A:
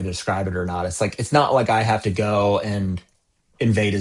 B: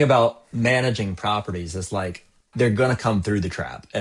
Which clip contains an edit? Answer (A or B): B